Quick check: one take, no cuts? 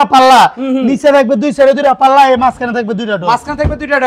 yes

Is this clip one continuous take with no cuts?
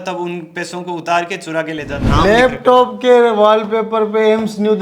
no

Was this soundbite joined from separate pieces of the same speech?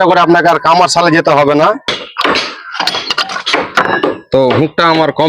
yes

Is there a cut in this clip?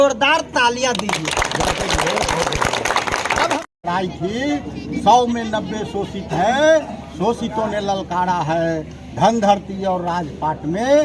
yes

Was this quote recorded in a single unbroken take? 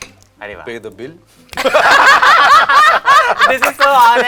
yes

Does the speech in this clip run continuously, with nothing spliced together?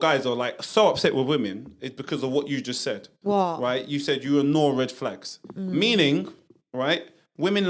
yes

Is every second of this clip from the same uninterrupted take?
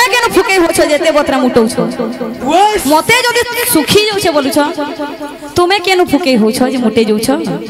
yes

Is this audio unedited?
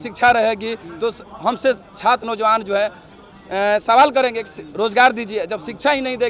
yes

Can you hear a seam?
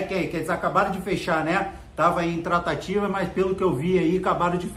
no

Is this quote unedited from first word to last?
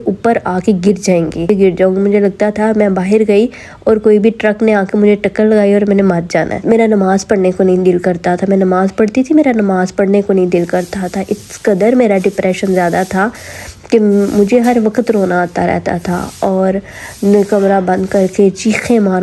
yes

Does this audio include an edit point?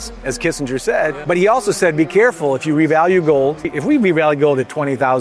yes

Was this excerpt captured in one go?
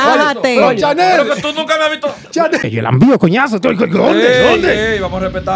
no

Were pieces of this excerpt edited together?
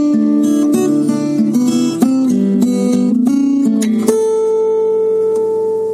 no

